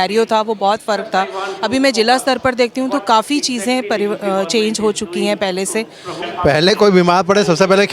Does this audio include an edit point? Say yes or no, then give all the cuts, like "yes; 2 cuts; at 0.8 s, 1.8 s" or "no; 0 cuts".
yes; 1 cut; at 6.1 s